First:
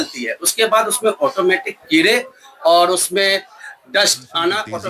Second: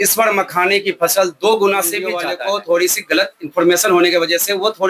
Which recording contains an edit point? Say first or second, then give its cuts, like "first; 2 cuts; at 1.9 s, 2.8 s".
second; 1 cut; at 2.2 s